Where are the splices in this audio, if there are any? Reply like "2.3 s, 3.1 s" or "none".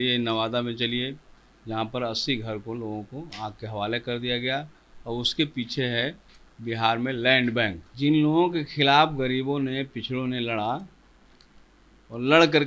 7.8 s